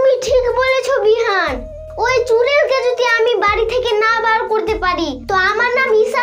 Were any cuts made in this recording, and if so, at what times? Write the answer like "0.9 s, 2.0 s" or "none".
none